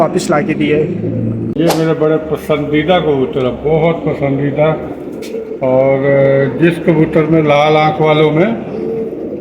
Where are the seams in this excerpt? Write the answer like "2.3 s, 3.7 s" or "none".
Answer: 1.5 s